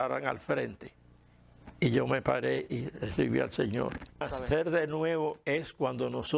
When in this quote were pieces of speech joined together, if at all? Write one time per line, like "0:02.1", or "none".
0:04.3